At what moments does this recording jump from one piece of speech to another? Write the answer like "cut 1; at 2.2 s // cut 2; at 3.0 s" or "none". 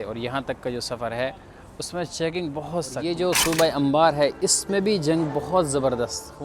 cut 1; at 3.1 s